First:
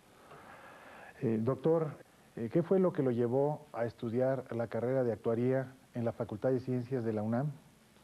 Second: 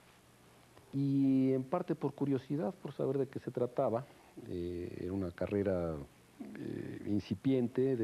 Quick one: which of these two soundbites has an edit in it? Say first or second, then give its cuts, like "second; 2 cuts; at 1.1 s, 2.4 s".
first; 1 cut; at 2.0 s